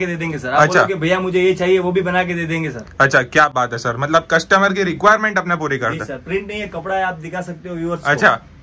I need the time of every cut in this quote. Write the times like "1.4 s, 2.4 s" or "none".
none